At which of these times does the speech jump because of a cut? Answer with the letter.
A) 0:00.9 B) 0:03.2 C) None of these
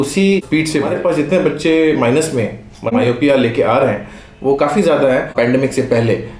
A